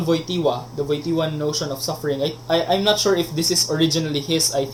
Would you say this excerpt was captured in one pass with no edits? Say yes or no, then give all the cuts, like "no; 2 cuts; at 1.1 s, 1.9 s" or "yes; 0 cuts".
yes; 0 cuts